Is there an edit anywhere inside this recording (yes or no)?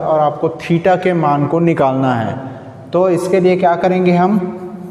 no